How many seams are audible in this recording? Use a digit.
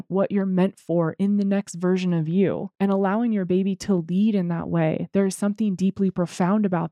1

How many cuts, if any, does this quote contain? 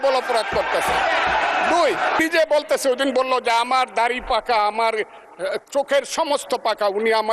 1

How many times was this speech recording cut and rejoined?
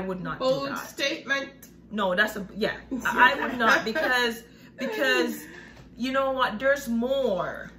0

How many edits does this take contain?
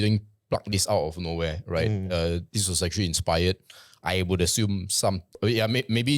1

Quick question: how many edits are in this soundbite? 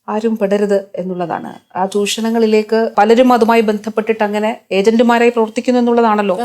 1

